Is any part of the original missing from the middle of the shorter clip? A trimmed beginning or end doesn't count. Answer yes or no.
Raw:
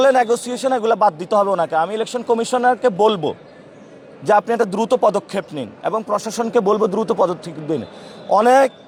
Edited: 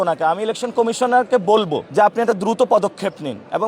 yes